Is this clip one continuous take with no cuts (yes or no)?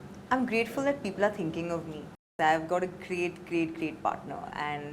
no